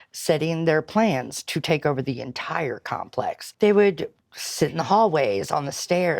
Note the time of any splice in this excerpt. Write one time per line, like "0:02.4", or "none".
0:03.5

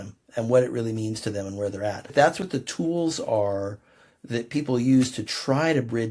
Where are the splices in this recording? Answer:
0:02.1

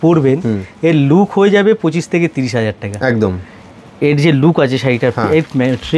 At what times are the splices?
none

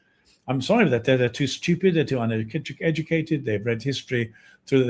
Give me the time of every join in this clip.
none

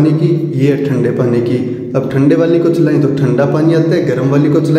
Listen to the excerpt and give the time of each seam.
none

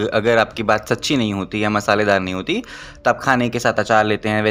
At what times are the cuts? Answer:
none

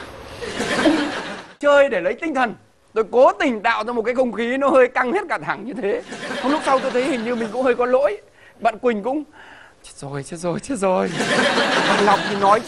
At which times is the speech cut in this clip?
0:01.5

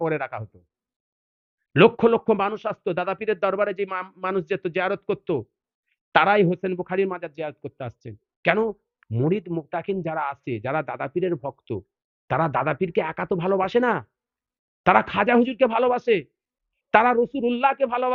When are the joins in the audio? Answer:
none

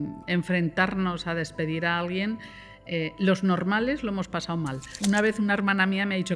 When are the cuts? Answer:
0:04.8

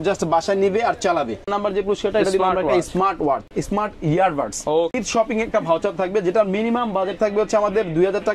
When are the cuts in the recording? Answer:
0:01.5
0:03.5
0:05.0

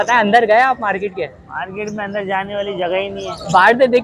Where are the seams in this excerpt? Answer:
none

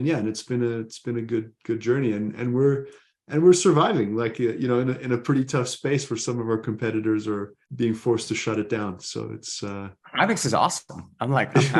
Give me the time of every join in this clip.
none

